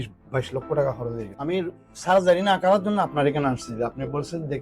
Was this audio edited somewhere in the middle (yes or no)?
yes